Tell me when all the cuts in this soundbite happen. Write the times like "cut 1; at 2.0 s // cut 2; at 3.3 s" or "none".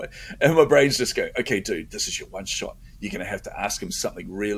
none